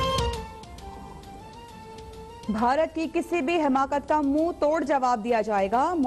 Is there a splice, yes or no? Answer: no